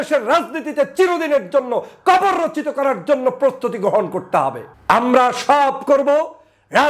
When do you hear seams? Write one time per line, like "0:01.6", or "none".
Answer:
0:04.7